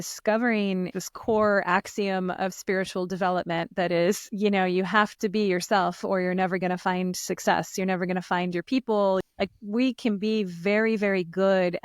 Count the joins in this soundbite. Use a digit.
3